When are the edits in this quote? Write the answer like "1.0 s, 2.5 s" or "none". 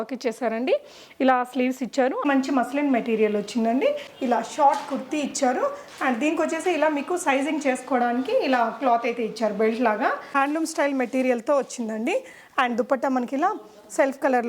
2.2 s, 4.1 s, 10.3 s